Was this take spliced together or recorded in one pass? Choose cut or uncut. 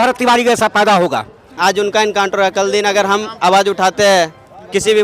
cut